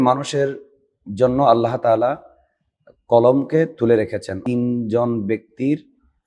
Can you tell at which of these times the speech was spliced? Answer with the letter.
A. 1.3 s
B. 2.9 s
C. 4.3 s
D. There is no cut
C